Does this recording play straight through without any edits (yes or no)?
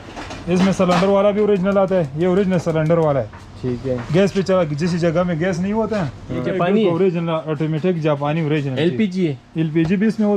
no